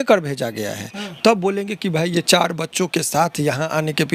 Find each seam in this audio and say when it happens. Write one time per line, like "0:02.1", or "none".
none